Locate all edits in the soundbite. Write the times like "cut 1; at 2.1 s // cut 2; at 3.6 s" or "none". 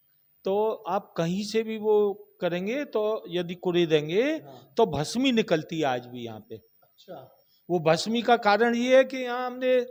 none